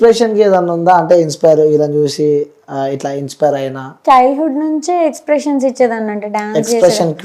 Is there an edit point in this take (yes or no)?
yes